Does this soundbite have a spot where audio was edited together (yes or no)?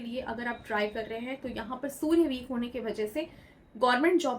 no